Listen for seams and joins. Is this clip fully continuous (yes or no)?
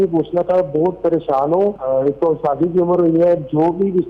no